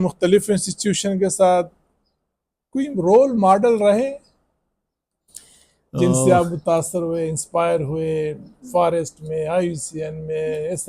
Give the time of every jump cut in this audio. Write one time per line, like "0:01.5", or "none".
none